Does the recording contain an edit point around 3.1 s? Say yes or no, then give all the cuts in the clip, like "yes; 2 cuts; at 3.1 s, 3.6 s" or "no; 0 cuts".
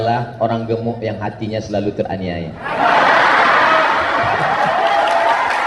no; 0 cuts